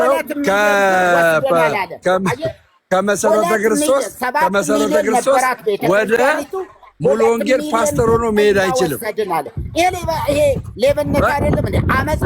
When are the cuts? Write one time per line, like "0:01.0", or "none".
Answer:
none